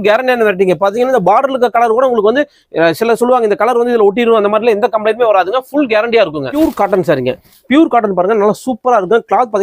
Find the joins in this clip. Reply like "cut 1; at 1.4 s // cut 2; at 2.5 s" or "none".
none